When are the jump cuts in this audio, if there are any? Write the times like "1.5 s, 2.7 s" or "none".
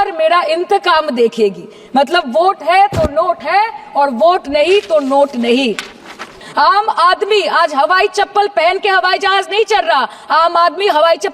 6.4 s